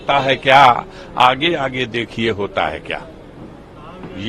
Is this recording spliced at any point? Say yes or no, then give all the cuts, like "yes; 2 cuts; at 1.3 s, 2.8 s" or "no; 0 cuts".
no; 0 cuts